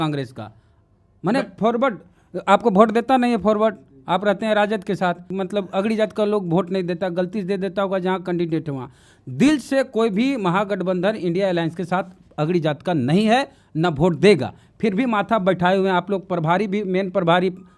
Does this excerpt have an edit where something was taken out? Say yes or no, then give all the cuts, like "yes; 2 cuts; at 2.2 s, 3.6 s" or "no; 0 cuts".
yes; 1 cut; at 5.3 s